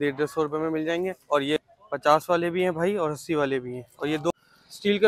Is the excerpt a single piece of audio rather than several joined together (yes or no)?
no